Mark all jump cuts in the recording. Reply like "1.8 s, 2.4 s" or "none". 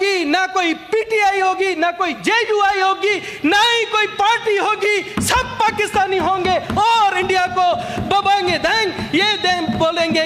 none